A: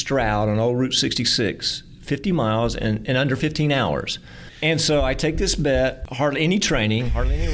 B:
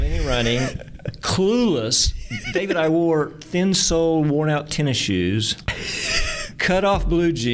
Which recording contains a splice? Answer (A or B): A